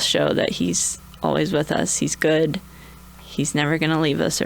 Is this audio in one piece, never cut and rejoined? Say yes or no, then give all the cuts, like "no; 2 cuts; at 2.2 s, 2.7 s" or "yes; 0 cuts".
yes; 0 cuts